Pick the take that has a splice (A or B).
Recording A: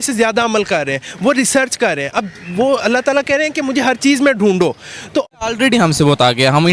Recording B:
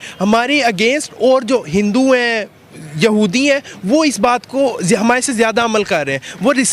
A